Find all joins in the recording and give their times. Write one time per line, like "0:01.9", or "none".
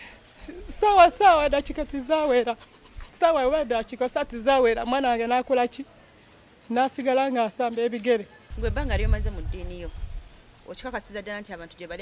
0:08.4

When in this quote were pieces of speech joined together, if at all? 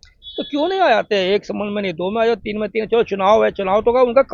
none

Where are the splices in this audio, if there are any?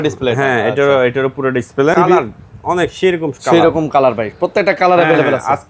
0:01.9

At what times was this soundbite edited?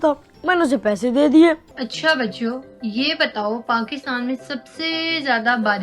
0:01.7

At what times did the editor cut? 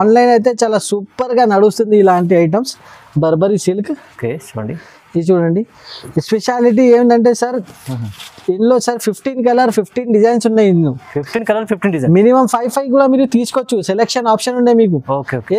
none

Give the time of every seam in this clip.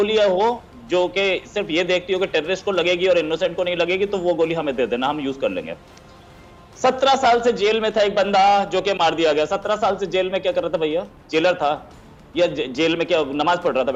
none

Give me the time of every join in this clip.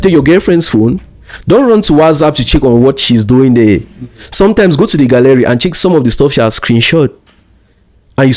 none

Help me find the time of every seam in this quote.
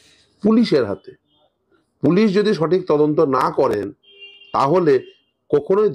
none

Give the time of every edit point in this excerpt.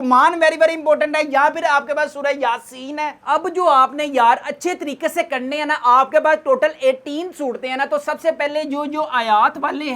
0:03.2

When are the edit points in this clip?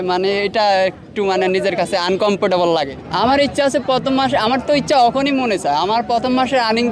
0:03.0

